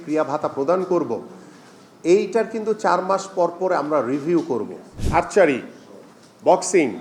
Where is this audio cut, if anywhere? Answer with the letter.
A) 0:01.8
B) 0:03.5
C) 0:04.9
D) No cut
C